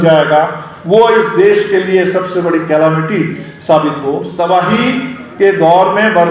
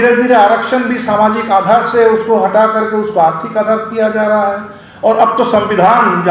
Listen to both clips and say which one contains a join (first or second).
first